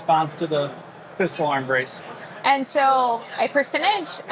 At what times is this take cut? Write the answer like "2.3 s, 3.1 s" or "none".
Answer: none

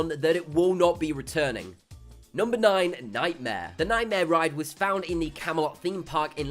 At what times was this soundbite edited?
2.2 s

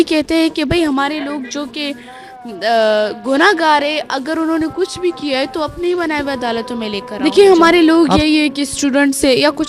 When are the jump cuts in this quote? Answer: 7.0 s

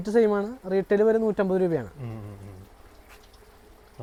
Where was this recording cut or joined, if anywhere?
none

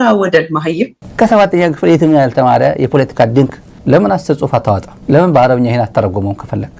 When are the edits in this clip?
0.9 s

